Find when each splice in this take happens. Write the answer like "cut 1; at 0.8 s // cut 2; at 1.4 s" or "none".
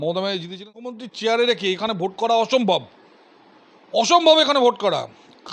cut 1; at 0.9 s